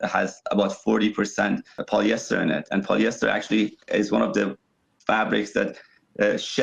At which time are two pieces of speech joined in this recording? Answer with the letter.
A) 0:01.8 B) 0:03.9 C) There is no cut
A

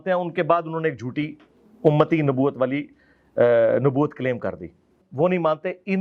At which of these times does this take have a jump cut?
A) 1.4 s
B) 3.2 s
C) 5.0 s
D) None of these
C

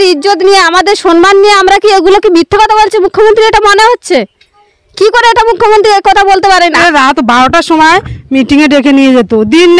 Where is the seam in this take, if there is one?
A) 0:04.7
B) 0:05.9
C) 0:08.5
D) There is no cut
D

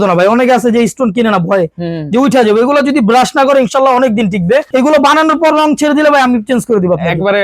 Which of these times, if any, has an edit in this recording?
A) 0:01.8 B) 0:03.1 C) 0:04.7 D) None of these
C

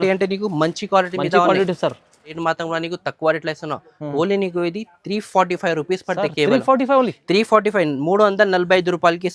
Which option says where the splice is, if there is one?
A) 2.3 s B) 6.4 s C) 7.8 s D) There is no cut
A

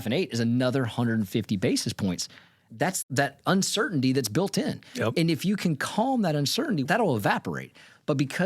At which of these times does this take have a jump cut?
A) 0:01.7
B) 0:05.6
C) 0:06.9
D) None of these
C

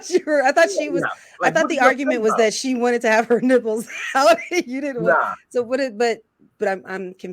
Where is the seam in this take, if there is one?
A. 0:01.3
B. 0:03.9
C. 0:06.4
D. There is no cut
C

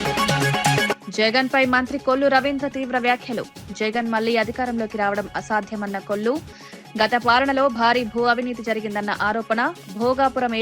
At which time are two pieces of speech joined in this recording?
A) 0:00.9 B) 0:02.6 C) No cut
A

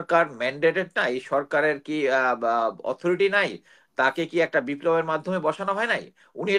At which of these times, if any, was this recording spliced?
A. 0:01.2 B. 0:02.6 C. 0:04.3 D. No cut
D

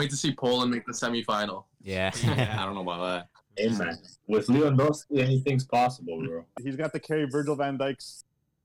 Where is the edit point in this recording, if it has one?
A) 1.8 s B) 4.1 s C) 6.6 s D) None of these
C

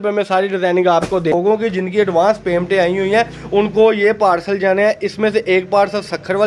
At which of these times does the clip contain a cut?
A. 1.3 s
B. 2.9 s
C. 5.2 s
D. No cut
A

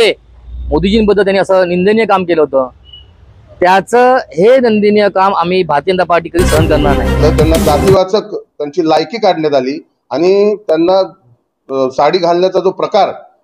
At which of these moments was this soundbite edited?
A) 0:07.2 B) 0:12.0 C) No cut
A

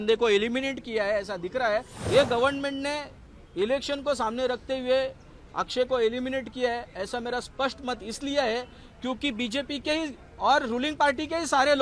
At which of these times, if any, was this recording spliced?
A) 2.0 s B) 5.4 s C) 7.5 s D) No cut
A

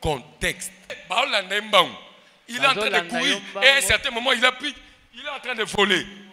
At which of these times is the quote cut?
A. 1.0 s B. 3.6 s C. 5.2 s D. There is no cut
A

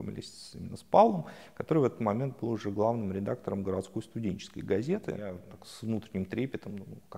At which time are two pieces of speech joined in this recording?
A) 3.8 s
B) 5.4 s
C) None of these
B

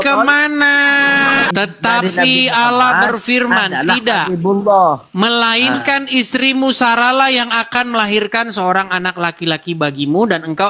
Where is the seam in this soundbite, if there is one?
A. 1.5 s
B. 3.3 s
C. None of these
A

